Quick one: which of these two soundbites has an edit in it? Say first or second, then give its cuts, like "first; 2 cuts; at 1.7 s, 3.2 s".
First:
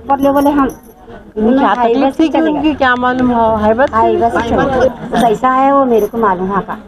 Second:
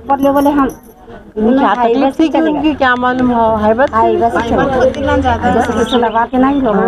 first; 1 cut; at 5.0 s